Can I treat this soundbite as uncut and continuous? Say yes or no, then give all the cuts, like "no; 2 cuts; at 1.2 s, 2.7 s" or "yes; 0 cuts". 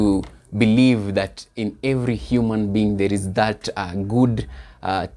yes; 0 cuts